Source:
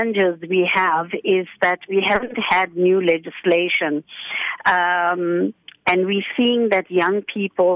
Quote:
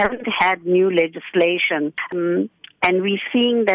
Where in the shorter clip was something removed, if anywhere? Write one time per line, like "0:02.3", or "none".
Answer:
0:02.1